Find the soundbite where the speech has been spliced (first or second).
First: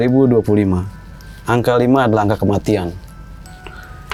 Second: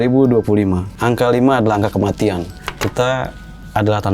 second